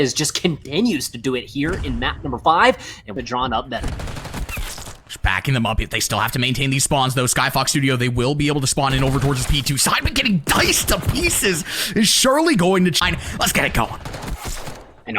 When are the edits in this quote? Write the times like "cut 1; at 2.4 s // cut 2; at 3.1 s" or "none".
cut 1; at 3.1 s // cut 2; at 13.0 s